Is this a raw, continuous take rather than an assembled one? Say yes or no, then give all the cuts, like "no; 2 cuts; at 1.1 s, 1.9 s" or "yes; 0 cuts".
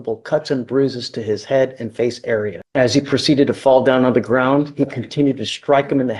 no; 1 cut; at 2.6 s